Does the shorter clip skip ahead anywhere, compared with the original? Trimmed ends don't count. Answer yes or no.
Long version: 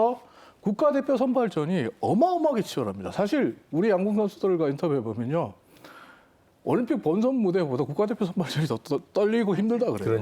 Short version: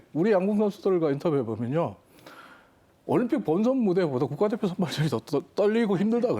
no